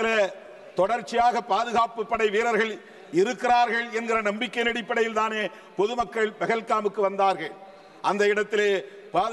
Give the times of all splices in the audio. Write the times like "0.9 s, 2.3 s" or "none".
none